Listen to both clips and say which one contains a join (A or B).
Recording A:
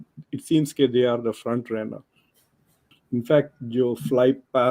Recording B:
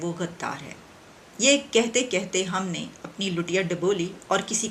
A